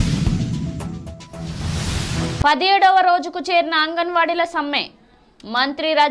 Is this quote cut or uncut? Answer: uncut